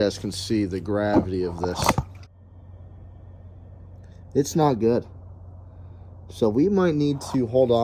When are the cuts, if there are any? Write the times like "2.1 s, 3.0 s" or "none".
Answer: none